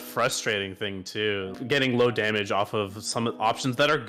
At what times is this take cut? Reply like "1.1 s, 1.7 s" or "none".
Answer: 1.6 s